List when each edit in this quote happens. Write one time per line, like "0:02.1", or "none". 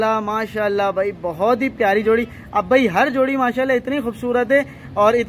none

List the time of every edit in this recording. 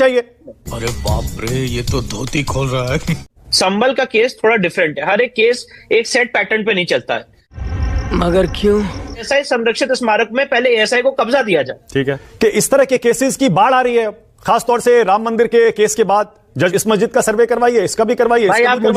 0:09.3
0:12.2
0:16.7

